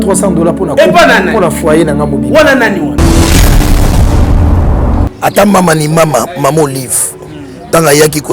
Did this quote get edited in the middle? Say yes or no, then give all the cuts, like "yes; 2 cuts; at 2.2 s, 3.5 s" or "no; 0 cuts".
yes; 1 cut; at 5.1 s